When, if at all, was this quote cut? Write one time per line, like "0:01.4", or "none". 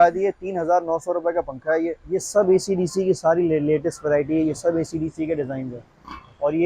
0:02.0